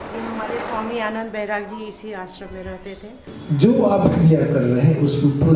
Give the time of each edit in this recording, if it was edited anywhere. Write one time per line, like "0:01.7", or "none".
0:03.3

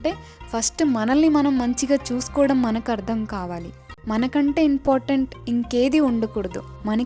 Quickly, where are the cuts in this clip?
0:04.0

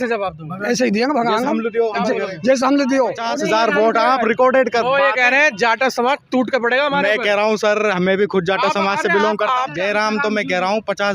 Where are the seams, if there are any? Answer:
0:03.3
0:09.7

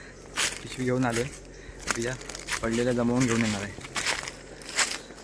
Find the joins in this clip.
0:03.9

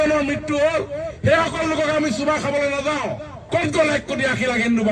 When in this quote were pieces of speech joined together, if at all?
0:03.4

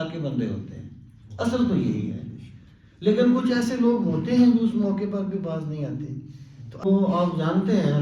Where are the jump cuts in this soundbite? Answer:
0:06.8

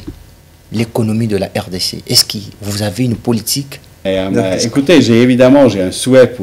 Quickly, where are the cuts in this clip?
0:03.9

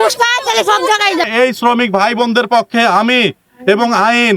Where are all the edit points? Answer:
0:01.3

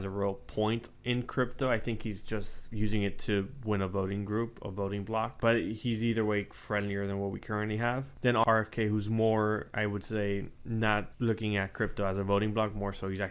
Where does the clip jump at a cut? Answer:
0:05.3
0:08.3
0:11.1

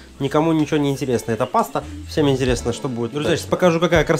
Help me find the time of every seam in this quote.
0:03.2

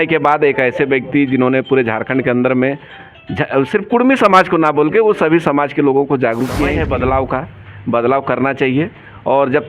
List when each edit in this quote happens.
0:06.8

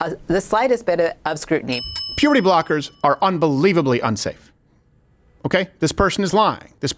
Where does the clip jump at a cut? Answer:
0:01.8

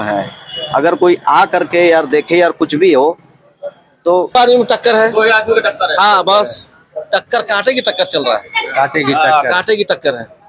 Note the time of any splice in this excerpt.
0:04.4

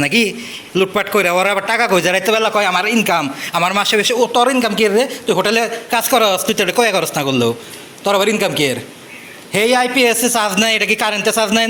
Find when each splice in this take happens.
none

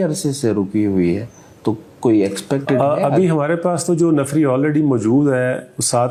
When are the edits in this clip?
none

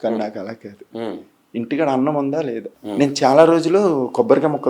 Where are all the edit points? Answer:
0:02.7

